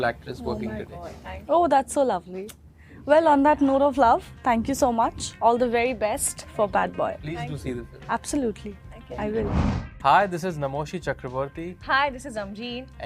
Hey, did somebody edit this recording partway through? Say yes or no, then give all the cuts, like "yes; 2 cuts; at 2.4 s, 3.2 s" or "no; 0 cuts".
no; 0 cuts